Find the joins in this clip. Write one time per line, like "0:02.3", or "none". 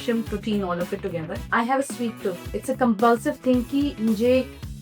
0:01.3
0:02.5